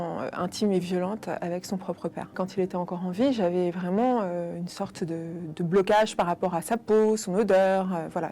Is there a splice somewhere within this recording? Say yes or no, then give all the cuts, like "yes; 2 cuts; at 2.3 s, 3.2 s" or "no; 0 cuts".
yes; 1 cut; at 2.4 s